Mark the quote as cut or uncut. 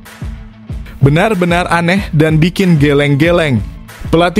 cut